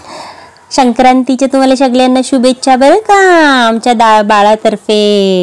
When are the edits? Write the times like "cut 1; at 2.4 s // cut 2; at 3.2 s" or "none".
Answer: none